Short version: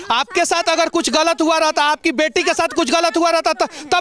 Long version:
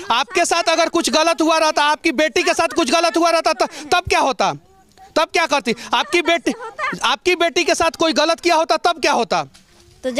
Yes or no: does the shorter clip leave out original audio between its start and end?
no